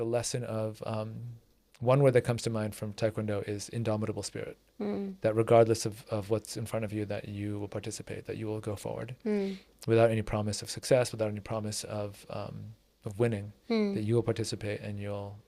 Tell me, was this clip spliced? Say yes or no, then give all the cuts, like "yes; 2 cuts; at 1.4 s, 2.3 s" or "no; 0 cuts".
no; 0 cuts